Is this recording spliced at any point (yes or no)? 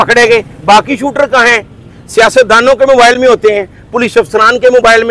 no